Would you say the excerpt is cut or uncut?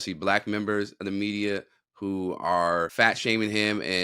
cut